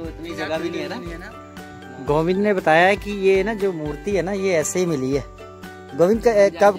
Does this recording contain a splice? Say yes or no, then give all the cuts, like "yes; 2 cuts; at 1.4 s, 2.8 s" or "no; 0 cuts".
yes; 1 cut; at 1.3 s